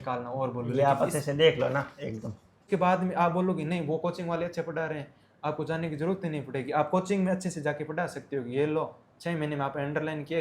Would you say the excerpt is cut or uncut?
cut